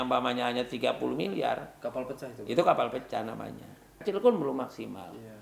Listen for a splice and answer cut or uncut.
cut